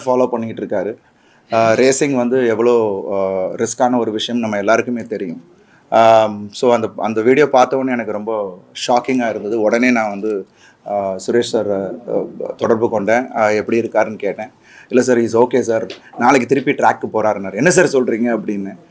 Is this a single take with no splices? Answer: yes; 0 cuts

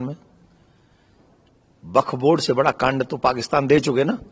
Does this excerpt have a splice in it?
no; 0 cuts

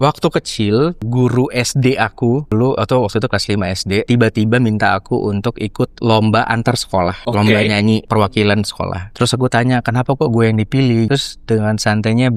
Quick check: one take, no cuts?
no; 7 cuts; at 1.0 s, 2.5 s, 4.1 s, 7.2 s, 8.1 s, 9.0 s, 11.1 s

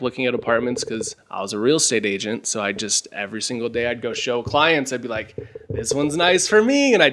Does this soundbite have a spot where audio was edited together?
no; 0 cuts

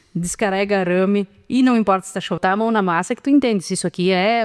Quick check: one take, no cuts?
no; 1 cut; at 2.4 s

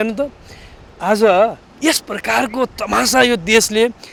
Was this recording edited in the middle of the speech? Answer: no; 0 cuts

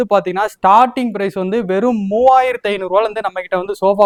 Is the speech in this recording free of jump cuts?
yes; 0 cuts

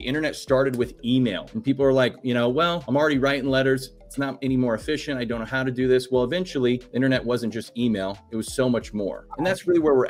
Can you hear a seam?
yes; 4 cuts; at 1.5 s, 2.8 s, 6.9 s, 9.2 s

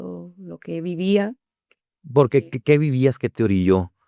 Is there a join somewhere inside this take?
no; 0 cuts

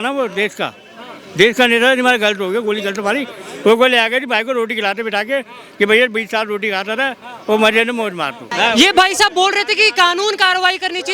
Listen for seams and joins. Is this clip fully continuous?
no; 1 cut; at 8.5 s

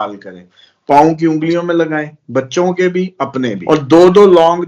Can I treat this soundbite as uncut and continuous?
no; 1 cut; at 3.6 s

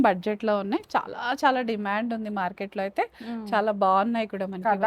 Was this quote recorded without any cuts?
yes; 0 cuts

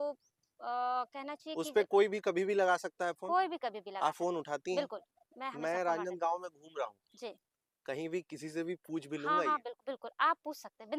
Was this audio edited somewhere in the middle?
no; 0 cuts

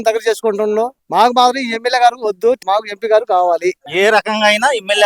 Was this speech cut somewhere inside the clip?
yes; 2 cuts; at 2.6 s, 3.8 s

